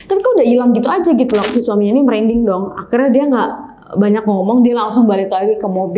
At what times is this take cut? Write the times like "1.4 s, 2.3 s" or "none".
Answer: 1.5 s